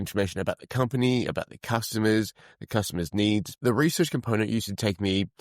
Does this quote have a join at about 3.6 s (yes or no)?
yes